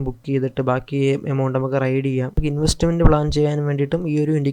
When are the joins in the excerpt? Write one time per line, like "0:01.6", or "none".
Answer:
0:02.4

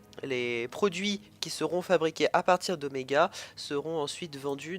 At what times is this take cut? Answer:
0:00.9

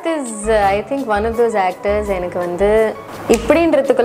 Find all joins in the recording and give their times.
0:03.1

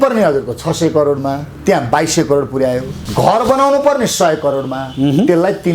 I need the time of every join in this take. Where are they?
0:01.5
0:03.0

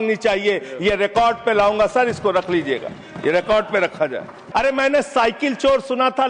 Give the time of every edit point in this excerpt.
0:04.4

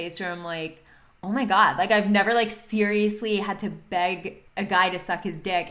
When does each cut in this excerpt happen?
0:04.4

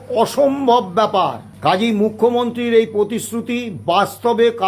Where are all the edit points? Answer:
0:01.5

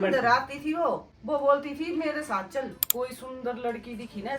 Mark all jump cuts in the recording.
0:01.1
0:02.8

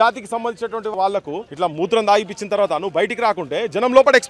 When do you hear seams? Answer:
0:00.9

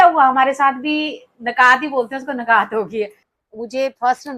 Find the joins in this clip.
0:03.2

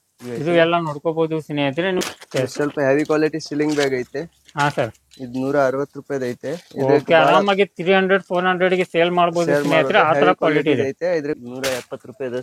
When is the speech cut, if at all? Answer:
0:02.0
0:11.4

